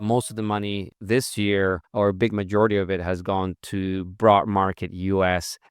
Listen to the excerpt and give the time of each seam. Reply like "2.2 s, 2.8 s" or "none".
0.9 s, 1.8 s